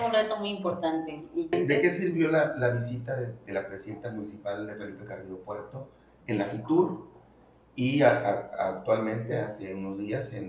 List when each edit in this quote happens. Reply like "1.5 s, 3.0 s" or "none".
1.5 s